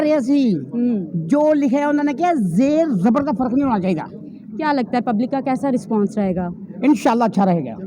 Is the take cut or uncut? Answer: uncut